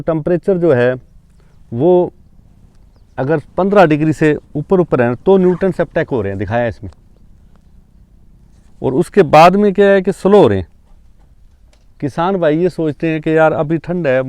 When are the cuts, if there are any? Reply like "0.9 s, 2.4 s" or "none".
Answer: none